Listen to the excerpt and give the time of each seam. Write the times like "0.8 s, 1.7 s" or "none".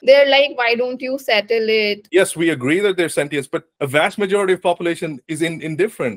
2.0 s